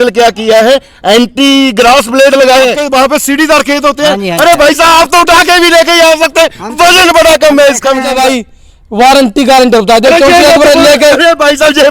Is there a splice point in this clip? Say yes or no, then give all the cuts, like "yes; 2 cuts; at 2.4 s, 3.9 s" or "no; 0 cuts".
yes; 2 cuts; at 2.8 s, 8.1 s